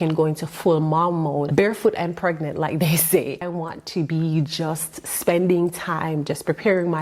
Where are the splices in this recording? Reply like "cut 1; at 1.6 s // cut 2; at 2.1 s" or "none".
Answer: cut 1; at 1.5 s // cut 2; at 3.4 s